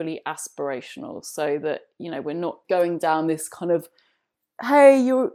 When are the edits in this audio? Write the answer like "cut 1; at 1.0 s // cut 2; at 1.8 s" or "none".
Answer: cut 1; at 2.6 s